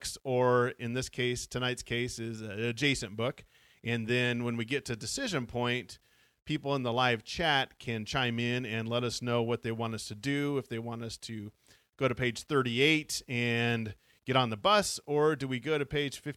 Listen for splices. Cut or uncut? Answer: uncut